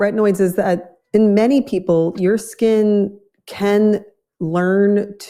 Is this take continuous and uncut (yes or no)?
yes